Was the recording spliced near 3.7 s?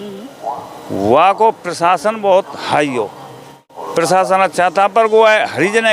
yes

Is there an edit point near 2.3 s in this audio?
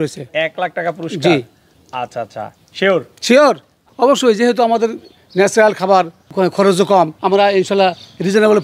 no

